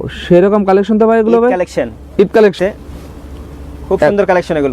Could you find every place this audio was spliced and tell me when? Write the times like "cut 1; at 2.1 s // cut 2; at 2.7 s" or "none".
cut 1; at 2.6 s